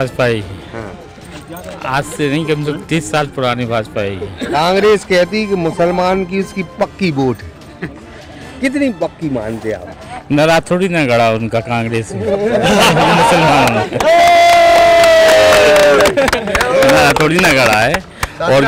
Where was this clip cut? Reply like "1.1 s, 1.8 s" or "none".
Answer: none

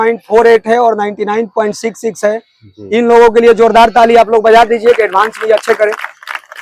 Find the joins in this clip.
none

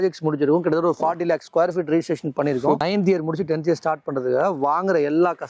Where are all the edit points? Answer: 2.8 s

